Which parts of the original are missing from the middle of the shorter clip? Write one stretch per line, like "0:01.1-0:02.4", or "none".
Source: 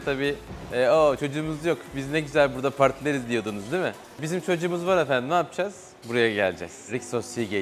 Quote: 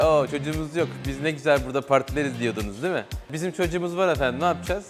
none